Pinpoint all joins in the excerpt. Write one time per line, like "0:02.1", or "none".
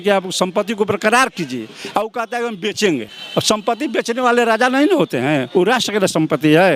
0:03.2

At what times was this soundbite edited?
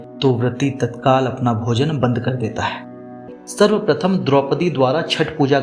0:03.3

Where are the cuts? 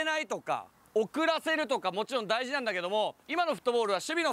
0:03.2

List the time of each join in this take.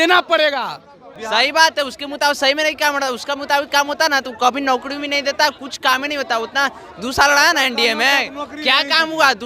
0:01.1

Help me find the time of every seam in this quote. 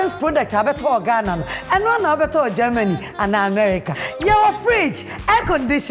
none

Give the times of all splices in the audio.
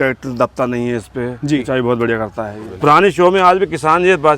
0:02.6

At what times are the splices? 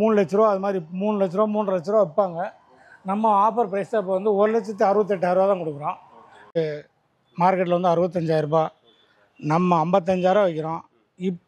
0:06.5

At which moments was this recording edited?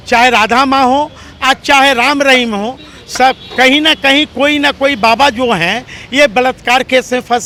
none

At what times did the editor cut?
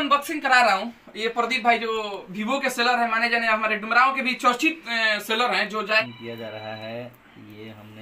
0:06.0

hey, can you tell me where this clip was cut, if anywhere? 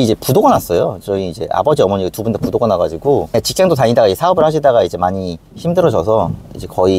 0:03.3

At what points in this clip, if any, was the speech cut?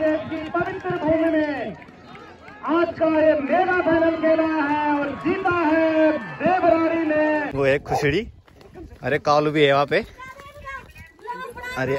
0:07.5

